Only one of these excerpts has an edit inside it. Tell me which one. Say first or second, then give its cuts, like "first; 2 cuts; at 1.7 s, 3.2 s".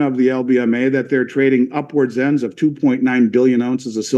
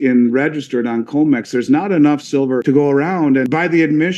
second; 2 cuts; at 2.6 s, 3.4 s